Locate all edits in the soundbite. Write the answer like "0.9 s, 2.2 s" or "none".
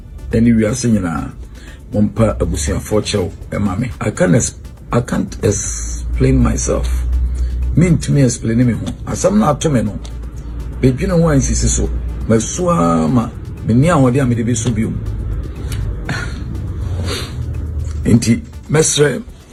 none